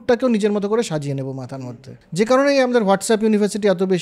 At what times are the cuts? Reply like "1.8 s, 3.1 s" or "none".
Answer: 1.5 s